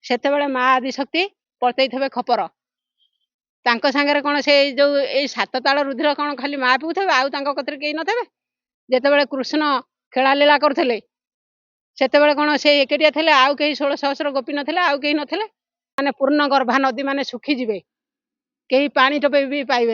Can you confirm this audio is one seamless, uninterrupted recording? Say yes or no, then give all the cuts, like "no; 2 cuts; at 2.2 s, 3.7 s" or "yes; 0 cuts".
no; 1 cut; at 15.8 s